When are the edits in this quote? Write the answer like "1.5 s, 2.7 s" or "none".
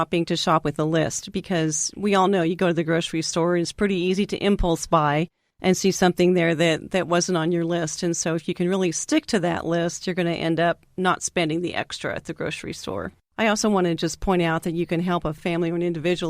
13.2 s, 15.4 s